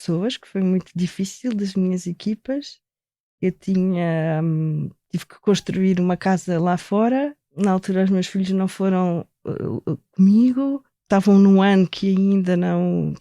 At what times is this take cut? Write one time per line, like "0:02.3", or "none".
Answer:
0:07.5
0:10.9